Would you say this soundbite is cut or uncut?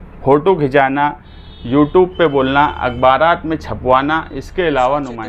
uncut